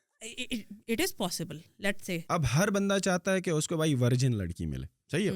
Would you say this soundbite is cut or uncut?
cut